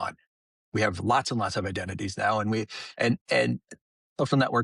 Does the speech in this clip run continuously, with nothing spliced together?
yes; 0 cuts

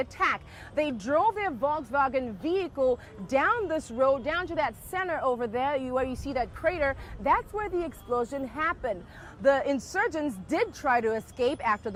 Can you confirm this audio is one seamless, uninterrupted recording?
yes; 0 cuts

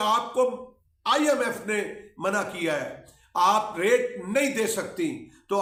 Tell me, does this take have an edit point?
no; 0 cuts

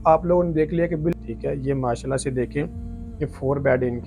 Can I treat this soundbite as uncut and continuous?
no; 1 cut; at 1.2 s

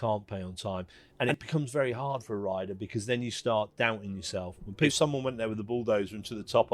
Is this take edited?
yes; 2 cuts; at 1.0 s, 4.9 s

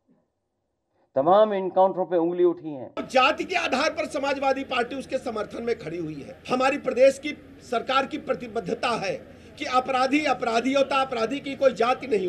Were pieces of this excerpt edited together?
yes; 2 cuts; at 3.1 s, 6.3 s

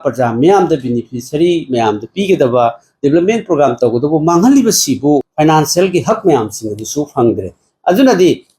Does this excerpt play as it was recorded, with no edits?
no; 1 cut; at 5.3 s

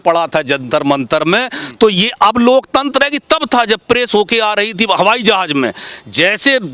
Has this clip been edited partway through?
no; 0 cuts

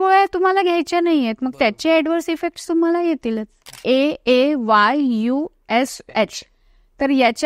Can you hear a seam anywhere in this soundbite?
yes; 1 cut; at 3.7 s

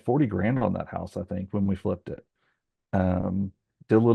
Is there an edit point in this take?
no; 0 cuts

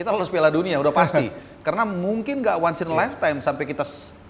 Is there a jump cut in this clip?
no; 0 cuts

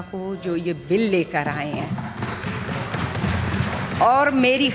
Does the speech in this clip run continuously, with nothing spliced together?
yes; 0 cuts

